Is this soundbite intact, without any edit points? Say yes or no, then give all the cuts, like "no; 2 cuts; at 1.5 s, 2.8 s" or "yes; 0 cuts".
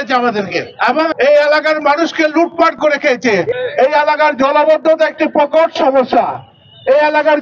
no; 2 cuts; at 1.0 s, 3.5 s